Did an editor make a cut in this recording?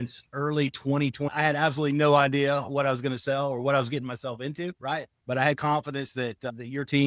yes; 2 cuts; at 1.2 s, 5.1 s

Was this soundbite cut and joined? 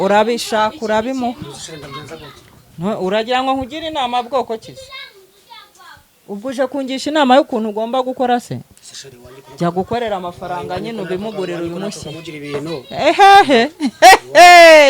no; 0 cuts

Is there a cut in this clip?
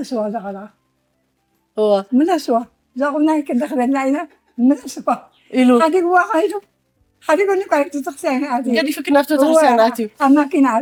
no; 0 cuts

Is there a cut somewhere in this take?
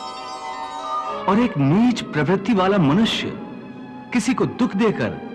yes; 1 cut; at 1.2 s

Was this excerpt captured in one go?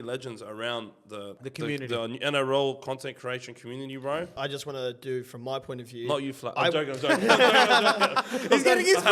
no; 2 cuts; at 1.4 s, 4.3 s

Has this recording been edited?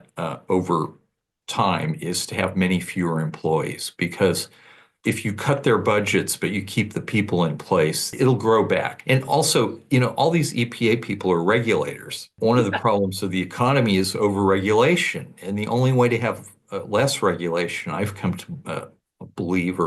yes; 4 cuts; at 4.9 s, 8.1 s, 9.0 s, 12.3 s

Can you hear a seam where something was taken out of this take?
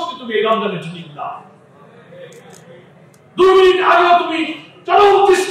no; 0 cuts

